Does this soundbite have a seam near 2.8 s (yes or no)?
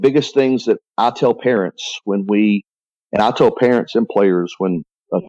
no